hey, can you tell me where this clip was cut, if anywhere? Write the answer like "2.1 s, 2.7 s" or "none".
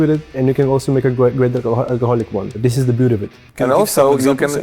2.6 s